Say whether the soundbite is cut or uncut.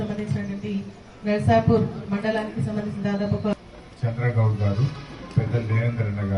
cut